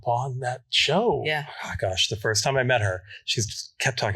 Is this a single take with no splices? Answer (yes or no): no